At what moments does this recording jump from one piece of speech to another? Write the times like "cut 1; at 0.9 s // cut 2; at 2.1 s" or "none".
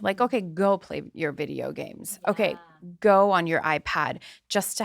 none